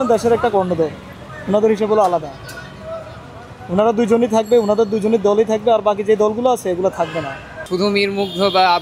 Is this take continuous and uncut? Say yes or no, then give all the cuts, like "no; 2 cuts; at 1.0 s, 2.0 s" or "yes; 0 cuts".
no; 1 cut; at 7.6 s